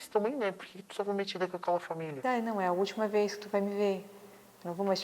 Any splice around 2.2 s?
yes; 1 cut; at 2.2 s

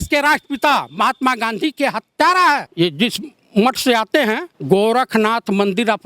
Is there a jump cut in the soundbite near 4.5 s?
yes; 2 cuts; at 2.7 s, 4.5 s

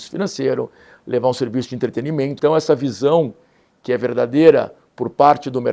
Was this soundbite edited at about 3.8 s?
no; 1 cut; at 2.3 s

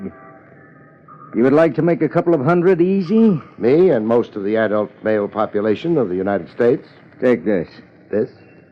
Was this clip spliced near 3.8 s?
yes; 1 cut; at 3.8 s

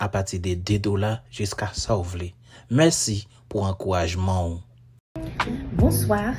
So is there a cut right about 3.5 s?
no; 1 cut; at 5.1 s

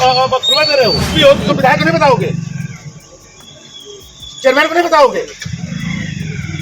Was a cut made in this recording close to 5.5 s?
no; 1 cut; at 1.1 s

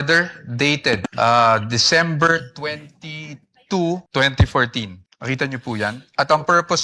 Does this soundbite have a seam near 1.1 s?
yes; 4 cuts; at 1.1 s, 4.1 s, 5.1 s, 6.0 s

